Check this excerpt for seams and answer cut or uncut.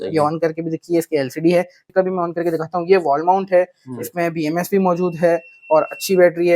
cut